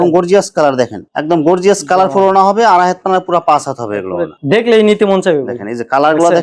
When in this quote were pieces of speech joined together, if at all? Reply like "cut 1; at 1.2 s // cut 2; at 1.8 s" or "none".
cut 1; at 1.1 s